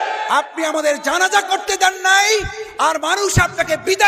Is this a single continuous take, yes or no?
yes